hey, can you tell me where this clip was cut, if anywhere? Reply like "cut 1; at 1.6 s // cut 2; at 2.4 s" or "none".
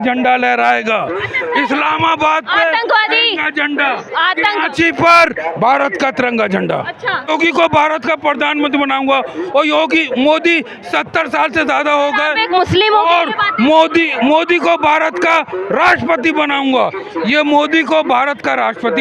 cut 1; at 7.3 s